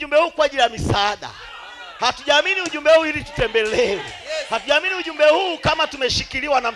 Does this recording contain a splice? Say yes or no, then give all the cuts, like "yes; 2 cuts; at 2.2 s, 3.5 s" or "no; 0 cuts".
no; 0 cuts